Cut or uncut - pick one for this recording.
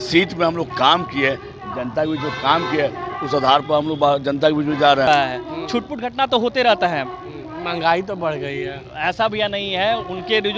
cut